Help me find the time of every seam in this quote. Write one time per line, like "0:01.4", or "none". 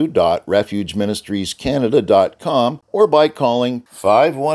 0:02.8